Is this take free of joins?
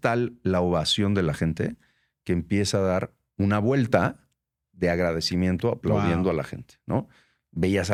yes; 0 cuts

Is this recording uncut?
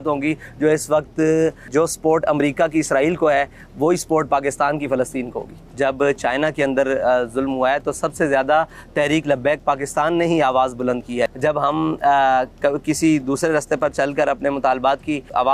no; 3 cuts; at 1.6 s, 5.6 s, 11.3 s

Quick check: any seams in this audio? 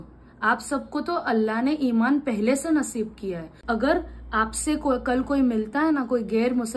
yes; 1 cut; at 3.5 s

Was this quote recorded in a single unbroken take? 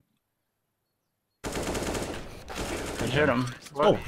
yes; 0 cuts

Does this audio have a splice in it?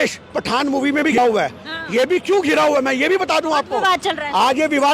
yes; 1 cut; at 1.2 s

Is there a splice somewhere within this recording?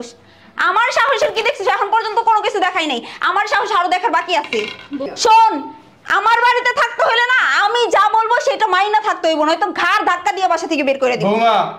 yes; 1 cut; at 5.0 s

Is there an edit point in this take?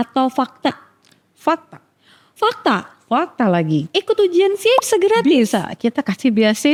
no; 0 cuts

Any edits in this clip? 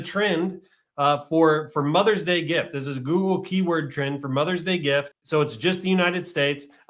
yes; 1 cut; at 5.2 s

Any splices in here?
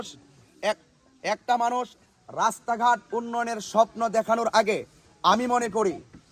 no; 0 cuts

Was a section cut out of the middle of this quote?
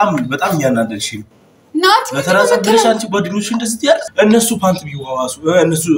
yes; 1 cut; at 4.1 s

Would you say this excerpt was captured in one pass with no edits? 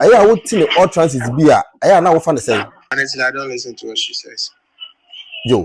no; 1 cut; at 2.9 s

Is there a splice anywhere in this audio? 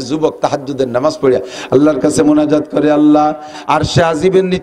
yes; 1 cut; at 3.5 s

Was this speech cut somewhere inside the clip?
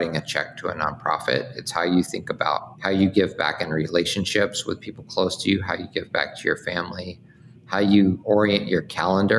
yes; 2 cuts; at 2.7 s, 8.2 s

